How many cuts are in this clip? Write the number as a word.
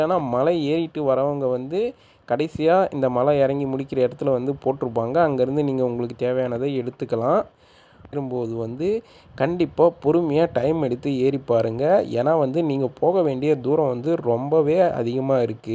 one